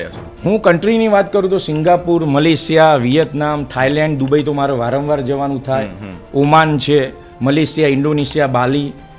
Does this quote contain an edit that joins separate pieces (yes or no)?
no